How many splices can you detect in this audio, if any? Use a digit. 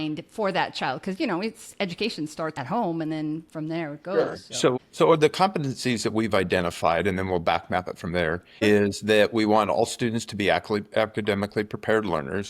1